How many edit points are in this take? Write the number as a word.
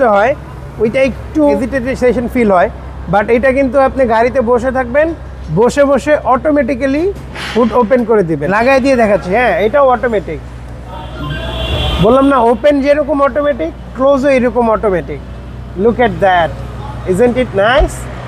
two